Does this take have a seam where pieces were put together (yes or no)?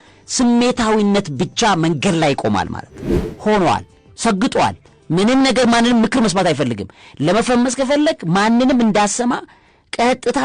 yes